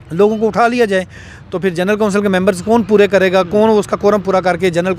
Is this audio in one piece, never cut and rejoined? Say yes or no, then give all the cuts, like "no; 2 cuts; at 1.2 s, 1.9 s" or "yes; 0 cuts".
yes; 0 cuts